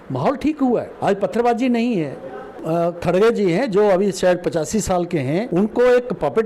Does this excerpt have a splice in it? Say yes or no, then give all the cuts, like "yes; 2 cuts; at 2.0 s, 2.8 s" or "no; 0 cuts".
yes; 3 cuts; at 0.9 s, 2.5 s, 5.5 s